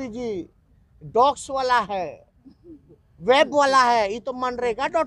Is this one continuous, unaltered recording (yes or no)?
yes